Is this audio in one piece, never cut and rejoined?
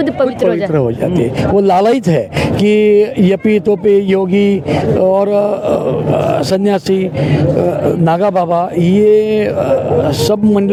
yes; 0 cuts

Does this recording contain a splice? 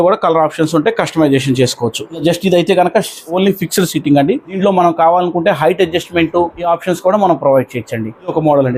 no; 0 cuts

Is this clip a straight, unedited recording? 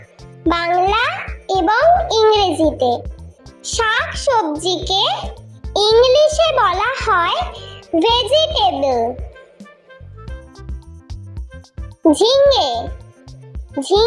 no; 2 cuts; at 9.5 s, 12.0 s

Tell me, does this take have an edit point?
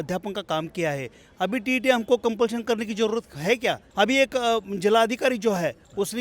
yes; 1 cut; at 3.8 s

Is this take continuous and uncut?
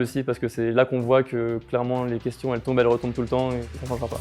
yes; 0 cuts

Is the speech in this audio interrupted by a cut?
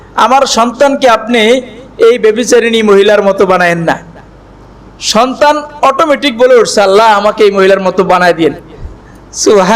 no; 0 cuts

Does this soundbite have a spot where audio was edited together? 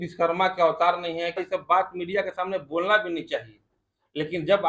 yes; 1 cut; at 1.4 s

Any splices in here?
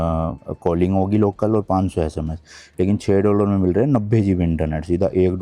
no; 0 cuts

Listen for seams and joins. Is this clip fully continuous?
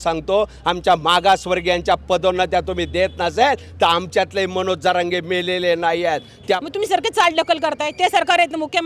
no; 1 cut; at 6.6 s

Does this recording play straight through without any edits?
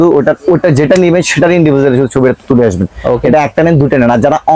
yes; 0 cuts

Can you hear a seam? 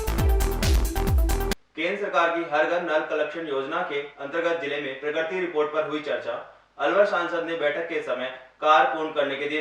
yes; 1 cut; at 1.5 s

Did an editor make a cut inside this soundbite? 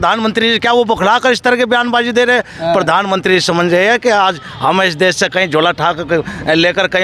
no; 0 cuts

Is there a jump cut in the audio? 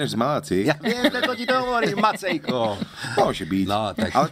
no; 0 cuts

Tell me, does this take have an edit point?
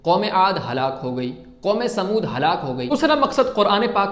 yes; 1 cut; at 2.8 s

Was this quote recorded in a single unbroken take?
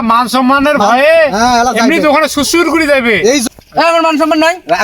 no; 1 cut; at 3.4 s

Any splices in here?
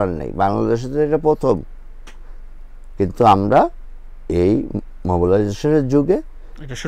no; 0 cuts

